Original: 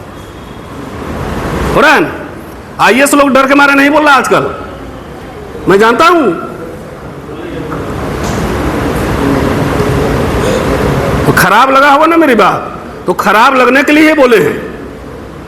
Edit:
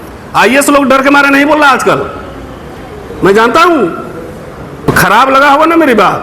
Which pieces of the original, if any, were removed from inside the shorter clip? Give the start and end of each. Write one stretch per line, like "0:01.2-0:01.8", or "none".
0:07.3-0:11.3

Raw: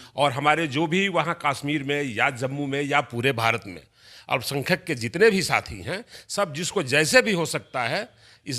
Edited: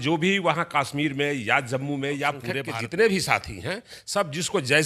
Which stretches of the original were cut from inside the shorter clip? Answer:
0:03.3-0:04.8

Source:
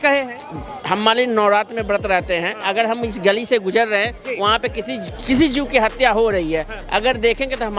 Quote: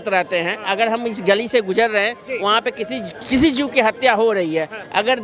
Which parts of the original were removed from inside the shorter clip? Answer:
none

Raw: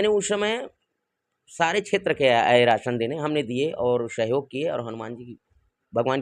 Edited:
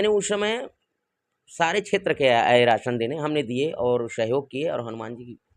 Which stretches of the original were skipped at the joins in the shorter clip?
none

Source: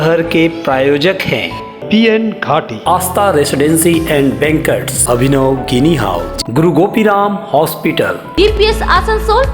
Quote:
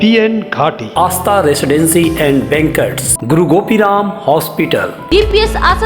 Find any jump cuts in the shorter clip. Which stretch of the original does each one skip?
0:05.0-0:06.3

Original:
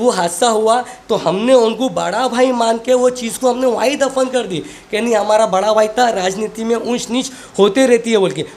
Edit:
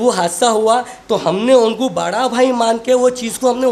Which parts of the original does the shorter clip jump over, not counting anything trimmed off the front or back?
none

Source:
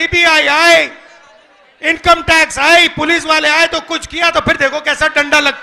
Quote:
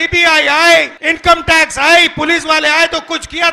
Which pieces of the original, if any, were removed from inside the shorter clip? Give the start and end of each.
0:01.0-0:01.8

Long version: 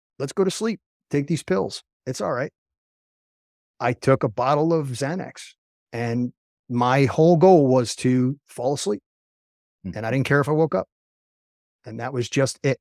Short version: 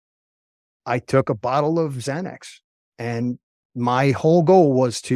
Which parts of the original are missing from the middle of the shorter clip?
none

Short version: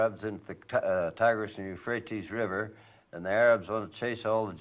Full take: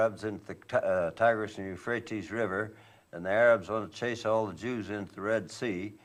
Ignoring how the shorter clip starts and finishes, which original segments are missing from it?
none

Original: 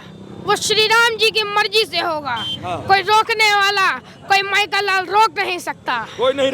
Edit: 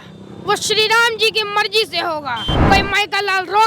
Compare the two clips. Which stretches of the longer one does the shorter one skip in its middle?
0:02.5-0:04.1

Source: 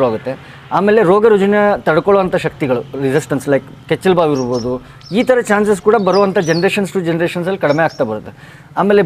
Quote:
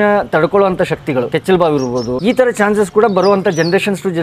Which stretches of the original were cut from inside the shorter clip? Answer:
0:02.8-0:03.8
0:04.7-0:05.1

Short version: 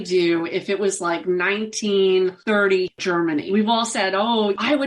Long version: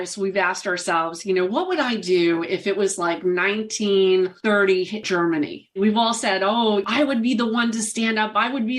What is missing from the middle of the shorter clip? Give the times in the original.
0:05.2-0:05.5

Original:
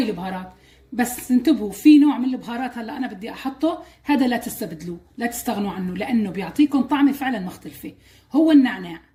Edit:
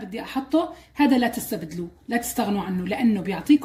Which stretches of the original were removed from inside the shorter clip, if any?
none

